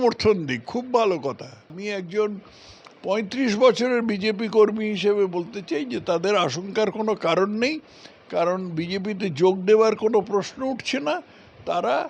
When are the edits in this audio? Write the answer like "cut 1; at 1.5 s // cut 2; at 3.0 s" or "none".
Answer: cut 1; at 1.8 s